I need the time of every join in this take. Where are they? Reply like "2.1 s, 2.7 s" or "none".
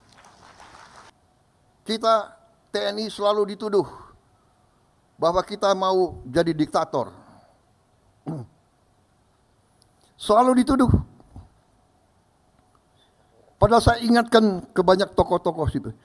1.1 s